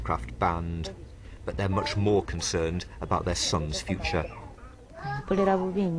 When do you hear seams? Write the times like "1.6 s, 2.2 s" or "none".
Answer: 4.3 s

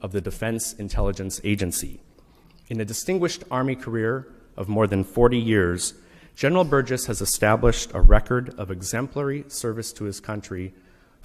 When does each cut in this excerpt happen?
1.8 s

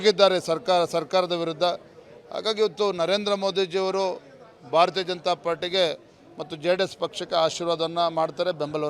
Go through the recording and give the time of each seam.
5.3 s

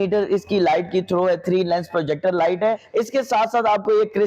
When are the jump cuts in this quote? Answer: 2.8 s

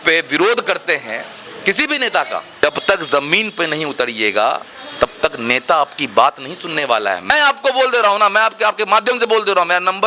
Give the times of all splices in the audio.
2.5 s, 7.3 s

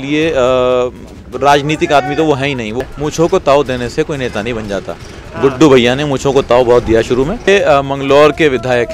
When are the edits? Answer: 2.8 s, 7.5 s

